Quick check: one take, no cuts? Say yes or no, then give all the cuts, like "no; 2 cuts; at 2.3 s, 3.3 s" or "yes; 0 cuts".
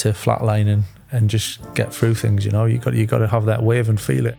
yes; 0 cuts